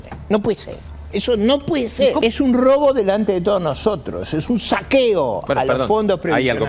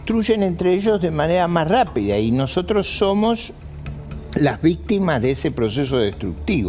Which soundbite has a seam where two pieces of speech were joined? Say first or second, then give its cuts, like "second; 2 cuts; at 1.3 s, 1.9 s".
first; 1 cut; at 2.2 s